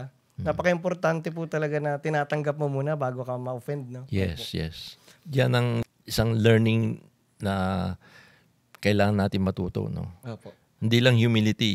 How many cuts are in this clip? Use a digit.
1